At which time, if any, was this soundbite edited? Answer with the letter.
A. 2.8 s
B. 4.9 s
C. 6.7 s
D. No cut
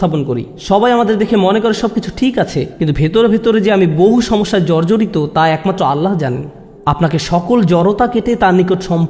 D